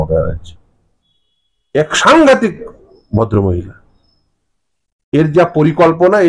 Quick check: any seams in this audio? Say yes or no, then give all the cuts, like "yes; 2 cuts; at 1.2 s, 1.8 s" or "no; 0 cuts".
no; 0 cuts